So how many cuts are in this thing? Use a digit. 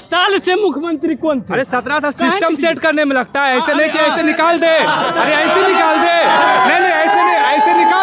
0